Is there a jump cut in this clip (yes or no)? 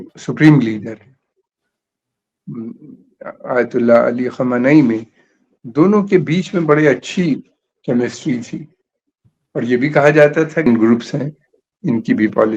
yes